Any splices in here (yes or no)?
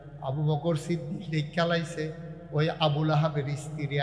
no